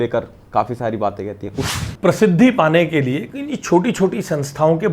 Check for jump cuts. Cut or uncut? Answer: cut